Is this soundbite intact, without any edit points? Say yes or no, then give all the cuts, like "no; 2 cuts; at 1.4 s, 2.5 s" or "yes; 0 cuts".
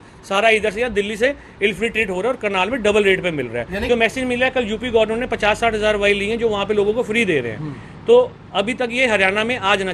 no; 1 cut; at 3.8 s